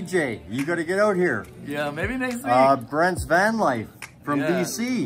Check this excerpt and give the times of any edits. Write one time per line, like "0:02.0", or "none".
none